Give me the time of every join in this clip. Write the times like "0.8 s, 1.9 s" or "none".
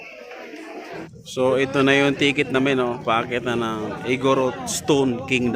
1.1 s